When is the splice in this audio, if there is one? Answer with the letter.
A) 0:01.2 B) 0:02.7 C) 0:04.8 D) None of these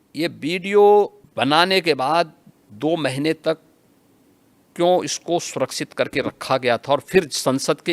A